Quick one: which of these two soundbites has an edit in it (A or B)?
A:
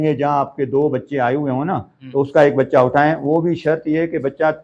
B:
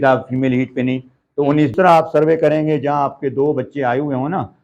B